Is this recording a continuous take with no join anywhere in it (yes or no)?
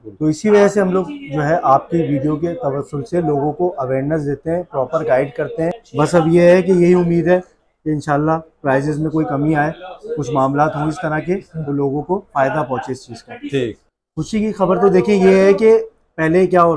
no